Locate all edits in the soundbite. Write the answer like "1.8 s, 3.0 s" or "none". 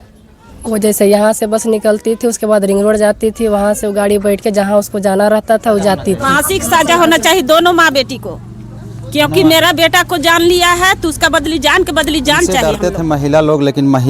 6.3 s, 12.7 s